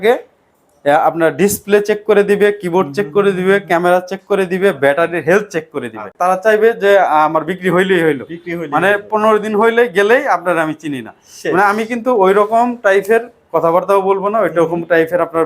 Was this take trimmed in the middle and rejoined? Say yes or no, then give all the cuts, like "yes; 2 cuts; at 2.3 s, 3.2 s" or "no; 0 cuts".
yes; 1 cut; at 6.1 s